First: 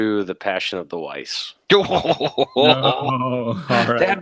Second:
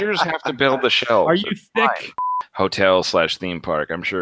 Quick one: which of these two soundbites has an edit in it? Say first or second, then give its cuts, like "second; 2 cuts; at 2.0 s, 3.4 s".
second; 1 cut; at 2.4 s